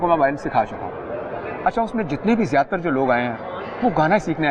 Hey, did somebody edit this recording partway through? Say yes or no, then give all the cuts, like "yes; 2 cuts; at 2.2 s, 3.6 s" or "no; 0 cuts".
no; 0 cuts